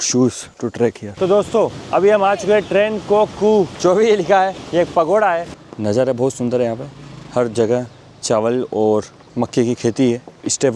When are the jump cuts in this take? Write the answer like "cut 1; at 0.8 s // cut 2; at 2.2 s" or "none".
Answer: cut 1; at 1.0 s // cut 2; at 3.7 s // cut 3; at 4.6 s // cut 4; at 5.6 s